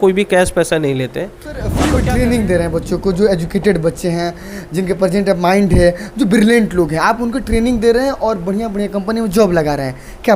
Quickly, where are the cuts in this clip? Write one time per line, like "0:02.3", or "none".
0:01.7